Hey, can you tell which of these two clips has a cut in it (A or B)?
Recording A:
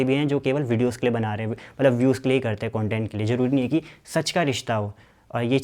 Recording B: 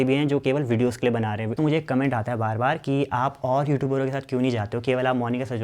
B